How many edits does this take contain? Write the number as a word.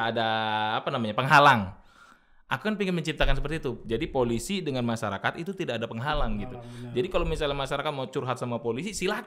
zero